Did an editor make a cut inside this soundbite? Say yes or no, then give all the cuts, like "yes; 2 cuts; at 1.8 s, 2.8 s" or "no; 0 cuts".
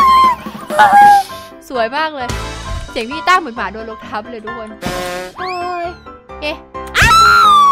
no; 0 cuts